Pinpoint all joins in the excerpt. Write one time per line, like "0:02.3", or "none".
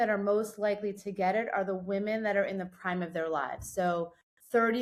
none